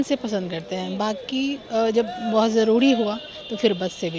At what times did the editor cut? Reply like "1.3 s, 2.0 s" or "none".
none